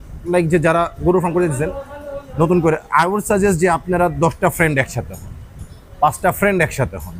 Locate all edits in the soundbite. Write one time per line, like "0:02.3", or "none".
none

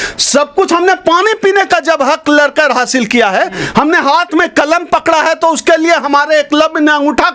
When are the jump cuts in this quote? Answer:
none

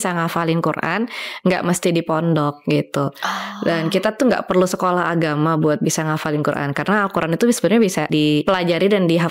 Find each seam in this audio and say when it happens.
0:08.1

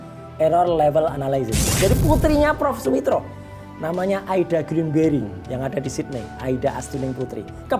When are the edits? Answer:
0:01.8

